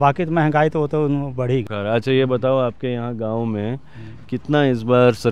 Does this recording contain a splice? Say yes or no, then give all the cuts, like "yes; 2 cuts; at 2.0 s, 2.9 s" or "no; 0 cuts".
yes; 1 cut; at 1.6 s